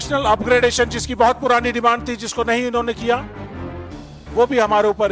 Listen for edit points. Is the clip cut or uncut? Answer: uncut